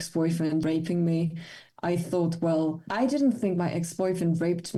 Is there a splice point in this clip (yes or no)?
no